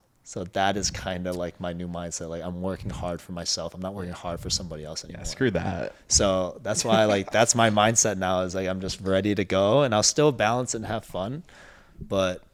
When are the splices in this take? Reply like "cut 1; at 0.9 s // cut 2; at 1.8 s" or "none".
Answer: none